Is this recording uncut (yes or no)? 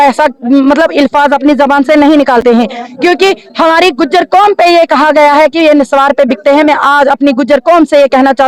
yes